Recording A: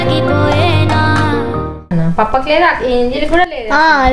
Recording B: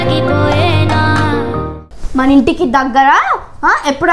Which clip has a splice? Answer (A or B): B